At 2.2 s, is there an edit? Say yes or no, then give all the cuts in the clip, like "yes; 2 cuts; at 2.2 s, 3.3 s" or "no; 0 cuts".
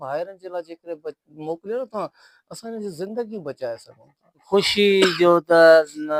no; 1 cut; at 4.4 s